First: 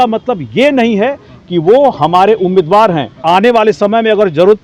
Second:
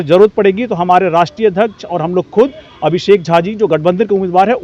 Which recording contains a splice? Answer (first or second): first